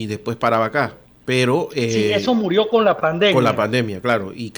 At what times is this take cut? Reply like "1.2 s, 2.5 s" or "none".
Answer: 1.1 s

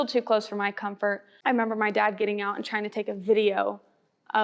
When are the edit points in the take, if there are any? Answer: 1.3 s

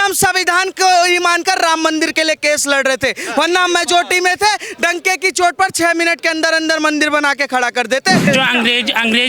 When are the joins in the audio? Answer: 8.2 s

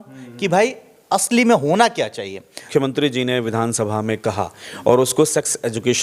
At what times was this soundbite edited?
2.5 s

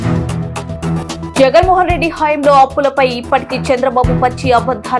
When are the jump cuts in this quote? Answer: none

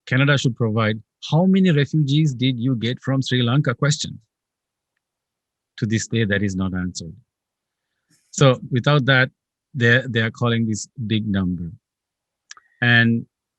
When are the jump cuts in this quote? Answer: none

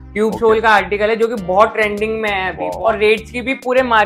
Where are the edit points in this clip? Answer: 2.7 s

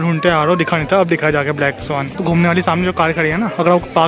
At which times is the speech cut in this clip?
2.2 s

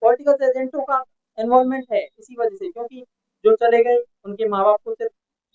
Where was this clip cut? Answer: none

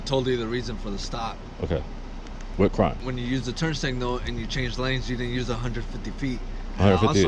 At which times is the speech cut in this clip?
3.0 s

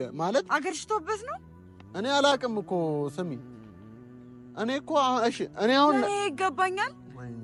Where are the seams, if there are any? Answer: none

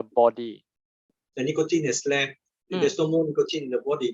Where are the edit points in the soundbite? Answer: 1.2 s

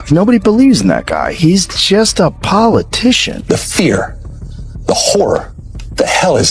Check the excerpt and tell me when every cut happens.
3.3 s

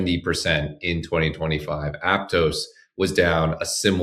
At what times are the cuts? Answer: none

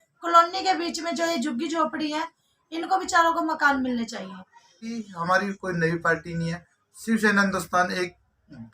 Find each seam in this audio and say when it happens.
5.0 s

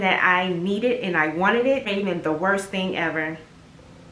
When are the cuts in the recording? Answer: 1.9 s

